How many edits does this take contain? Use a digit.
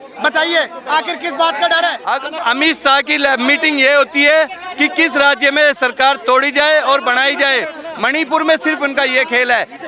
1